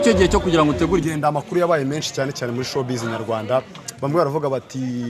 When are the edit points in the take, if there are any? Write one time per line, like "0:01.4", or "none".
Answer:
0:01.0